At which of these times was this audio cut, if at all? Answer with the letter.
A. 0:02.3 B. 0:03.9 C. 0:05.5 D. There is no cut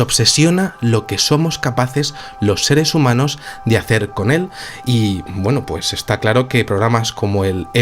B